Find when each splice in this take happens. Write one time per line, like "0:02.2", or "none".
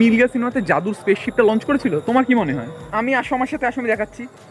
0:02.8